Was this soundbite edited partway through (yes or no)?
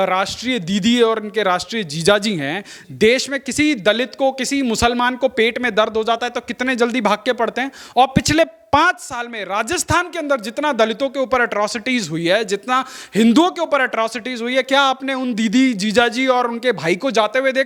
no